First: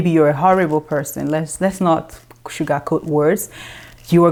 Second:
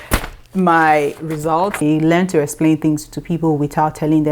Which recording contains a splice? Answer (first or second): second